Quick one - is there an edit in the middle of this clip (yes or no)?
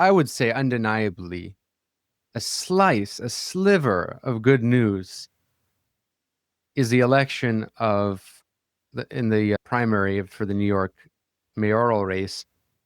no